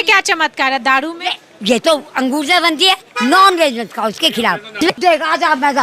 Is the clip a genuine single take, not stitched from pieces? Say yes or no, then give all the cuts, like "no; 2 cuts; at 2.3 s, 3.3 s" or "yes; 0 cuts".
no; 1 cut; at 4.8 s